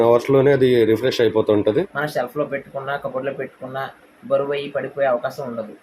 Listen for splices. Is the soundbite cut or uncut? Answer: cut